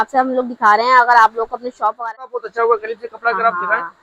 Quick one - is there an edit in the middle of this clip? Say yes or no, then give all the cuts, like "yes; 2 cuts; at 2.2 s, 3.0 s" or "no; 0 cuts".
yes; 1 cut; at 2.3 s